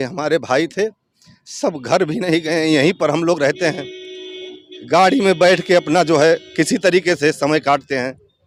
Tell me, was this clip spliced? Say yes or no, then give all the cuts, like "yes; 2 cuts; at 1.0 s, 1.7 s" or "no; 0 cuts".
no; 0 cuts